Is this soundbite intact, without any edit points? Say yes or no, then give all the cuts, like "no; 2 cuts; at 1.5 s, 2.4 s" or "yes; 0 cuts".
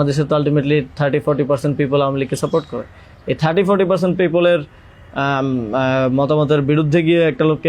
yes; 0 cuts